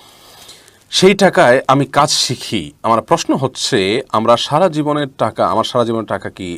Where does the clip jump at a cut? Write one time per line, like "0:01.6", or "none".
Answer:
none